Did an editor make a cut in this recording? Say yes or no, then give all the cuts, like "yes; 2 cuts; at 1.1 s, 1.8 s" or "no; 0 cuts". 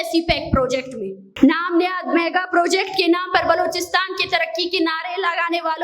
no; 0 cuts